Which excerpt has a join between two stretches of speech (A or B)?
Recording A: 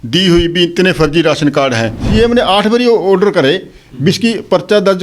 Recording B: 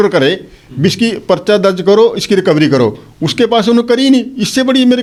A